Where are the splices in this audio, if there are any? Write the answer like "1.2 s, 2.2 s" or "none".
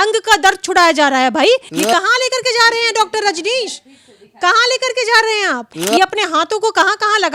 1.7 s, 5.8 s